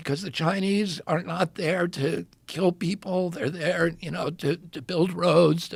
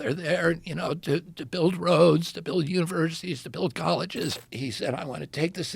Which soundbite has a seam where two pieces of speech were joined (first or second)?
second